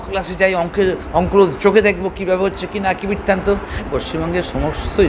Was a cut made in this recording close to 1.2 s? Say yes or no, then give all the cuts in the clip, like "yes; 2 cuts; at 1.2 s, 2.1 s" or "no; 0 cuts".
no; 1 cut; at 3.8 s